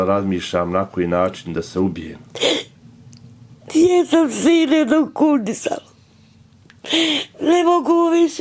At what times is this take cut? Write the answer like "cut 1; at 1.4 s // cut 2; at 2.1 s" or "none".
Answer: none

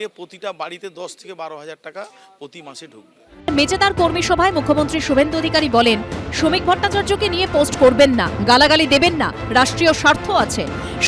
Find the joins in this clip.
cut 1; at 3.5 s

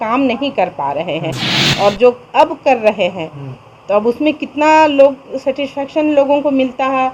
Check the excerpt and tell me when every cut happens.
none

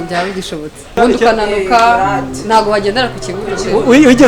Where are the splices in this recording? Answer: cut 1; at 1.0 s

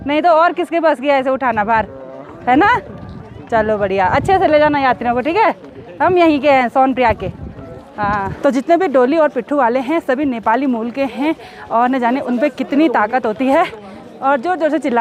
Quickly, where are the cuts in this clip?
none

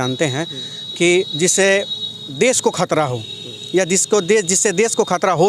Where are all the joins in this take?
none

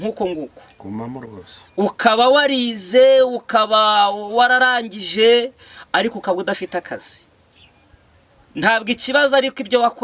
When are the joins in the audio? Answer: none

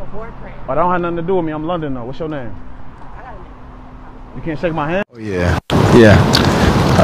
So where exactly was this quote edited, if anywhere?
cut 1; at 5.1 s

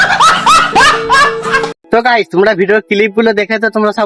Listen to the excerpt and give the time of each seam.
none

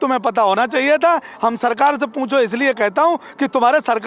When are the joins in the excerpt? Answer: none

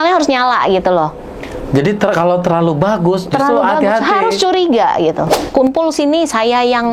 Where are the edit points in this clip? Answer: cut 1; at 5.4 s

